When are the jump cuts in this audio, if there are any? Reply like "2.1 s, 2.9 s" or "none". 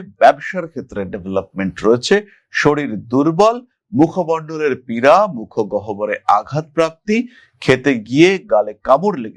none

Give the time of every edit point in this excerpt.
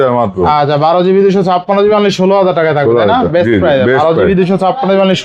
none

